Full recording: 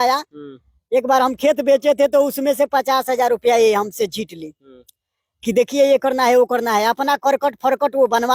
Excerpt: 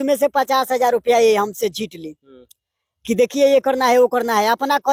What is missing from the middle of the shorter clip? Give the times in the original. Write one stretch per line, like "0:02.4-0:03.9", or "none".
none